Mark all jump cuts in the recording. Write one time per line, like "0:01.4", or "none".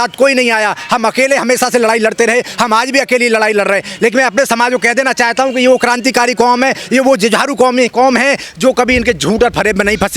none